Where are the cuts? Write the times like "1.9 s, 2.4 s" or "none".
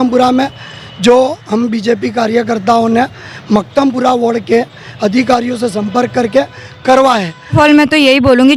7.5 s